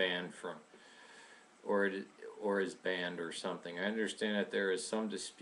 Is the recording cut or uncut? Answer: uncut